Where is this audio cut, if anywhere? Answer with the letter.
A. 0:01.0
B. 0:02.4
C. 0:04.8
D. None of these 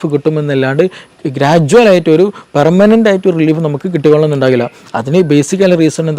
D